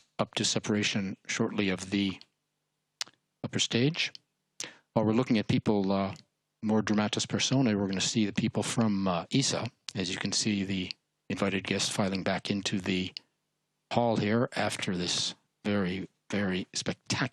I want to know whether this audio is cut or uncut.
uncut